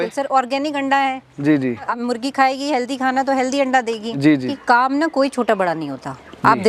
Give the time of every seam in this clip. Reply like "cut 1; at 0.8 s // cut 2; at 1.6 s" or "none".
cut 1; at 1.9 s // cut 2; at 4.5 s